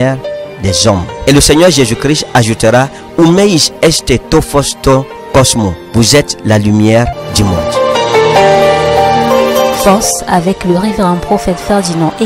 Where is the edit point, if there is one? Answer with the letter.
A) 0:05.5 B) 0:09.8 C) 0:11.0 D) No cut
B